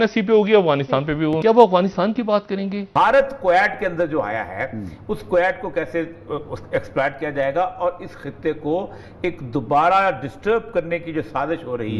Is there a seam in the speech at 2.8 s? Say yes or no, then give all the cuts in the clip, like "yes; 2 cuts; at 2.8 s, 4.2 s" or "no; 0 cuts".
yes; 2 cuts; at 1.3 s, 2.8 s